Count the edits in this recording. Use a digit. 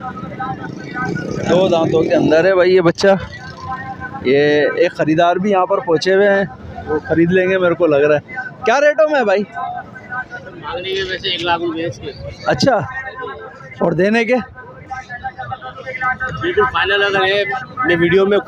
0